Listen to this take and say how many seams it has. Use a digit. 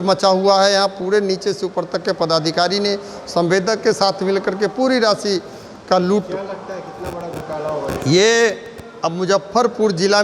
0